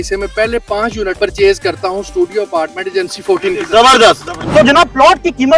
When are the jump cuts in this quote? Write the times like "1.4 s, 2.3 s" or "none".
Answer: 1.2 s, 4.4 s